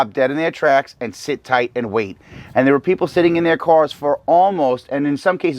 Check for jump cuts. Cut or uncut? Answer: uncut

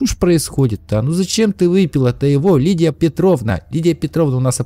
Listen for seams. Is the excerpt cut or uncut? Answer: uncut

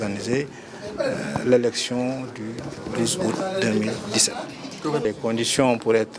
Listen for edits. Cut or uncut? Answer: cut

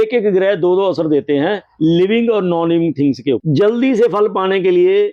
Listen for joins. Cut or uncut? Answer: cut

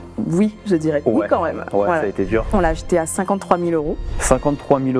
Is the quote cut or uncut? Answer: cut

